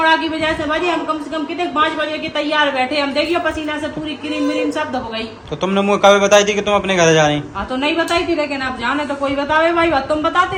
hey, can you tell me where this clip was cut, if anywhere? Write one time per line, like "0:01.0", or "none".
none